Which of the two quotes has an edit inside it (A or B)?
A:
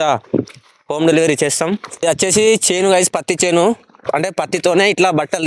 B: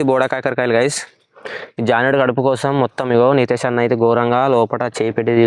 A